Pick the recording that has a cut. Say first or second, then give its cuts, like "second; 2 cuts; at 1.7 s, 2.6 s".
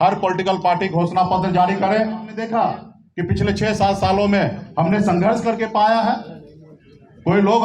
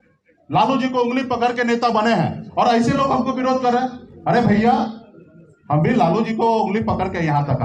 first; 1 cut; at 2.3 s